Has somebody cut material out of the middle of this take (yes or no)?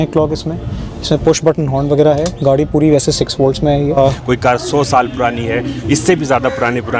yes